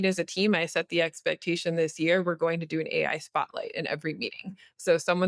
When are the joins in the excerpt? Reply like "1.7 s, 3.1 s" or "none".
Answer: none